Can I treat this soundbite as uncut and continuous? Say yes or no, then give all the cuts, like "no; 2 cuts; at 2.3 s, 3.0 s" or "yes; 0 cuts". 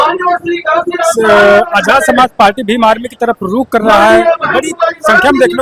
yes; 0 cuts